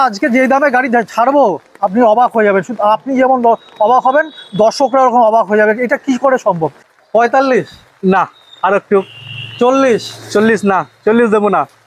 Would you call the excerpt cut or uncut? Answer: cut